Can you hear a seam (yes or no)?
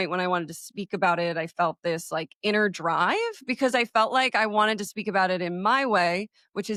no